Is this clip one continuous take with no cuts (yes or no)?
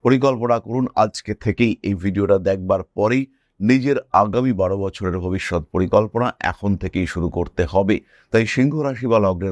yes